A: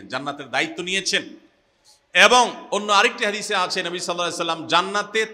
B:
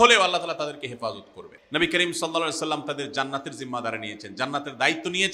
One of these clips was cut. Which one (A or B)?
B